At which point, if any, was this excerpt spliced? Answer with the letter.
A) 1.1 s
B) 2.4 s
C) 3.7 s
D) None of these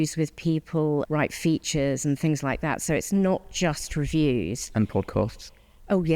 A